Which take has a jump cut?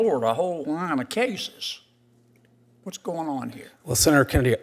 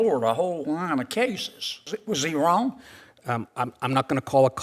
second; 1 cut; at 2.0 s

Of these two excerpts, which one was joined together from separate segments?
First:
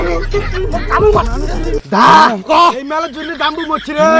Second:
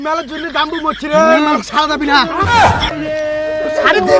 second; 1 cut; at 2.9 s

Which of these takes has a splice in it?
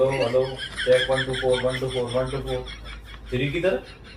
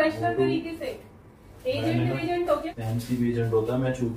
second; 1 cut; at 2.7 s

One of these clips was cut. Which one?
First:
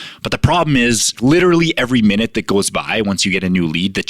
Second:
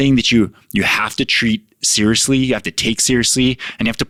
first; 1 cut; at 1.2 s

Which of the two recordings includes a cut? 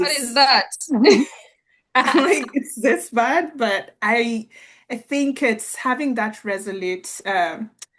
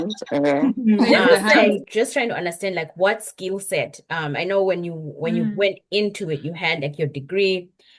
second; 1 cut; at 1.8 s

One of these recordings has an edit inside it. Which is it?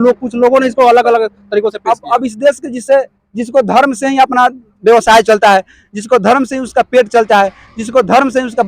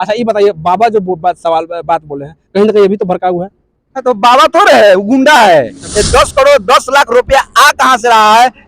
second; 1 cut; at 5.8 s

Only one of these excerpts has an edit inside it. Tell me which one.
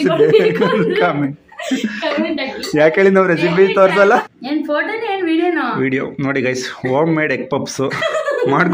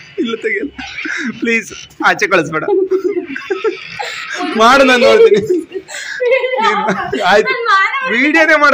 first; 1 cut; at 4.3 s

